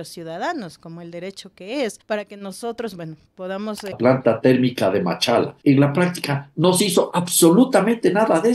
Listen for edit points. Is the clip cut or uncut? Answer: cut